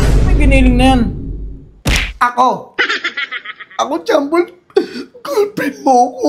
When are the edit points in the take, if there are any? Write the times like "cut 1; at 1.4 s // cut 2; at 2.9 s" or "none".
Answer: none